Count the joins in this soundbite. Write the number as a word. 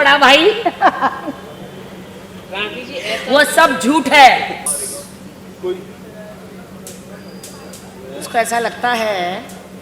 one